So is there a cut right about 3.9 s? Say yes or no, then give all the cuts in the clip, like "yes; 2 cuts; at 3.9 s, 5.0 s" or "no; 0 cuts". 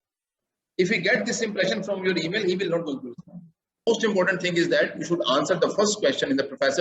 yes; 1 cut; at 3.9 s